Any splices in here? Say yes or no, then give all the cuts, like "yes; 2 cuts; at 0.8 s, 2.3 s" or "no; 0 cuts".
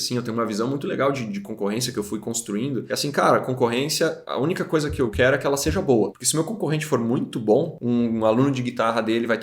yes; 5 cuts; at 2.9 s, 4.2 s, 5.1 s, 6.2 s, 7.8 s